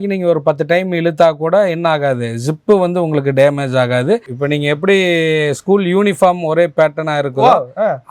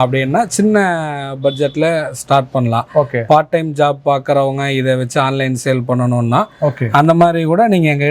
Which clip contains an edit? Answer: first; 1 cut; at 4.3 s

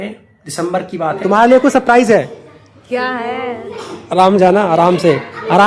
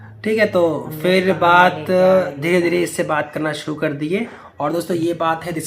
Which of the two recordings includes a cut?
first; 1 cut; at 1.2 s

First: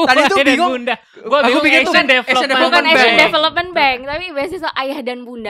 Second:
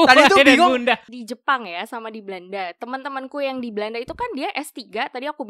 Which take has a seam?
second; 1 cut; at 1.1 s

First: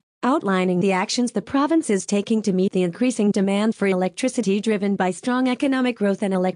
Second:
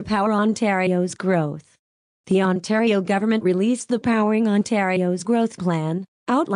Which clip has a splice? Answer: first; 1 cut; at 2.1 s

